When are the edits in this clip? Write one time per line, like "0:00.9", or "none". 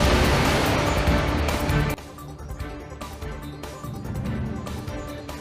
0:01.8